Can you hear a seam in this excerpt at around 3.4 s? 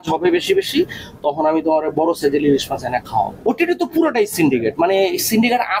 yes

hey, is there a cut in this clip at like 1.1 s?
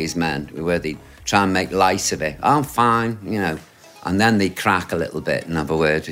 yes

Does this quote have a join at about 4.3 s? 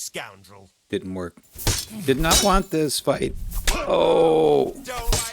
no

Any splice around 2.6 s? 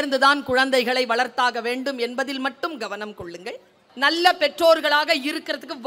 no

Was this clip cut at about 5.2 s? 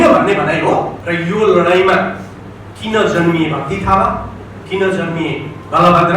no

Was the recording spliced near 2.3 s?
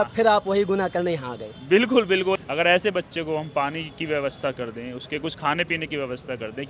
yes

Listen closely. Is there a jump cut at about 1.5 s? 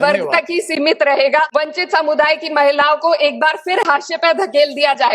yes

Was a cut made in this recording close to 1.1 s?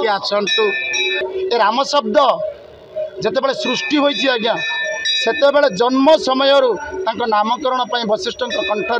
yes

